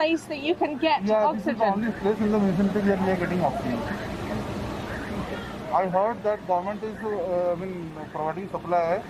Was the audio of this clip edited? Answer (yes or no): no